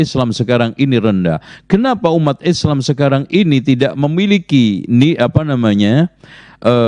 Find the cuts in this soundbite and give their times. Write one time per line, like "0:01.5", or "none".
none